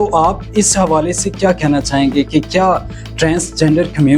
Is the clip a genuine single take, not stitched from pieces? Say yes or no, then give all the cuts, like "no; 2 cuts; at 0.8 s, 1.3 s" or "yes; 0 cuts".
yes; 0 cuts